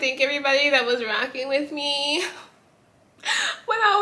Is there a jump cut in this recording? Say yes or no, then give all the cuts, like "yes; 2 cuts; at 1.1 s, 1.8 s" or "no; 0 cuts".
no; 0 cuts